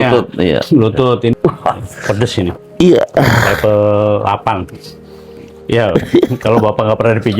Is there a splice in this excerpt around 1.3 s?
yes; 1 cut; at 1.3 s

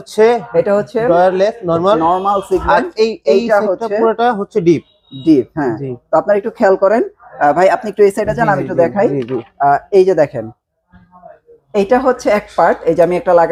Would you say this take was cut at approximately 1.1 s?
no; 0 cuts

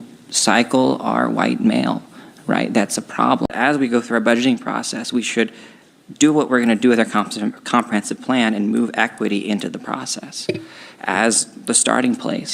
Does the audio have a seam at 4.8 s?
no; 1 cut; at 3.5 s

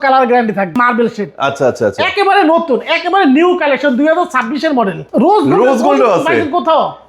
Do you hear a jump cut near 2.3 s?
no; 2 cuts; at 0.8 s, 5.0 s

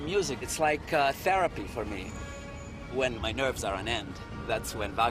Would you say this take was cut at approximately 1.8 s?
yes; 1 cut; at 1.8 s

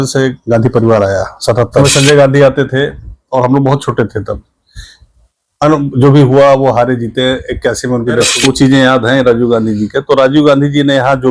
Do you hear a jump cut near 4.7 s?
no; 2 cuts; at 1.8 s, 8.3 s

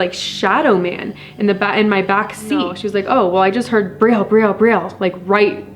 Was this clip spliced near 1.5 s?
no; 1 cut; at 2.8 s

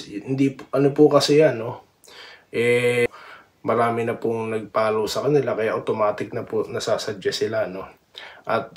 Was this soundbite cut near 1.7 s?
no; 1 cut; at 3.1 s

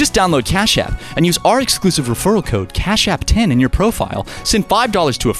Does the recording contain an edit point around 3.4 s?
no; 0 cuts

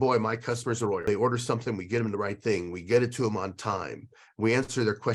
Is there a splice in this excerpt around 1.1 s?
yes; 1 cut; at 1.1 s

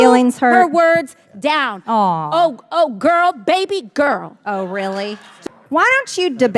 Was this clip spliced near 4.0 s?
no; 1 cut; at 5.3 s

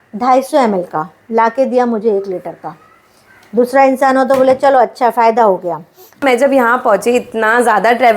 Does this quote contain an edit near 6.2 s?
yes; 1 cut; at 6.2 s

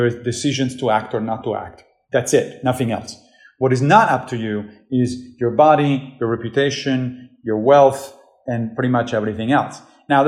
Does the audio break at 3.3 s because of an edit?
no; 0 cuts

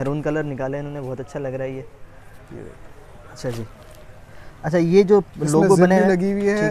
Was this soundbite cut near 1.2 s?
no; 0 cuts

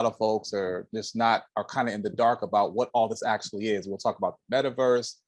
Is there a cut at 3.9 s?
no; 0 cuts

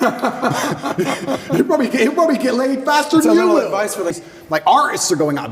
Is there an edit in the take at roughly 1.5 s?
no; 1 cut; at 4.2 s

